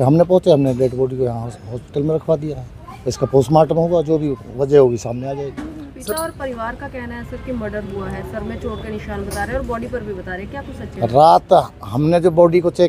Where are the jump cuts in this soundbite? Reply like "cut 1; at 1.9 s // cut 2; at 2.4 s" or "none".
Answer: none